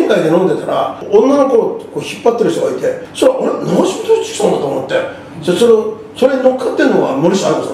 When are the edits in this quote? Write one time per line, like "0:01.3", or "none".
0:01.0
0:03.0